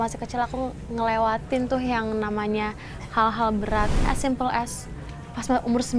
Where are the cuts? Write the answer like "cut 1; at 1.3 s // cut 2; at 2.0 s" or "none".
cut 1; at 4.1 s